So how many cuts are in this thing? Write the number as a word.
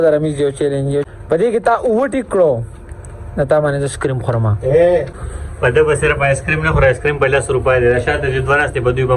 two